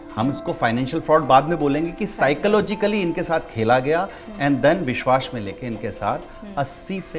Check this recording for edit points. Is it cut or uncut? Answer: uncut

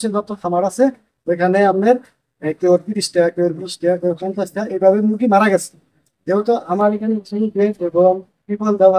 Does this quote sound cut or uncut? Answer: uncut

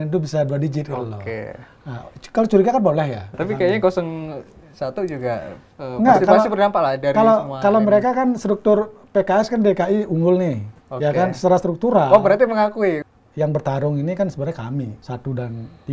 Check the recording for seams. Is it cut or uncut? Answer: cut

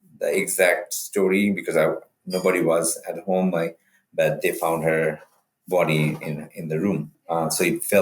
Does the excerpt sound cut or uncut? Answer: cut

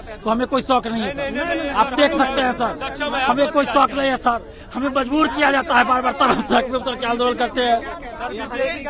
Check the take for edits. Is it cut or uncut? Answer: uncut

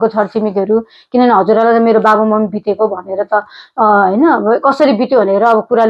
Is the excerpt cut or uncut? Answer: uncut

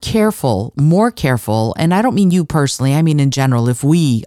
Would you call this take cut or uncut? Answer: uncut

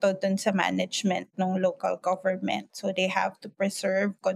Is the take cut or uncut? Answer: uncut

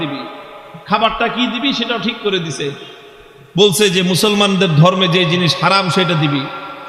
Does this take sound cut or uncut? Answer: uncut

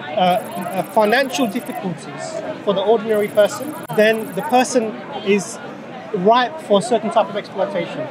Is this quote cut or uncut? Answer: cut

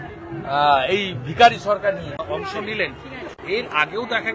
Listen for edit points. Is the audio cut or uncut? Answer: cut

